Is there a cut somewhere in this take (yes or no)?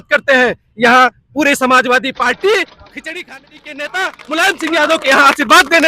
yes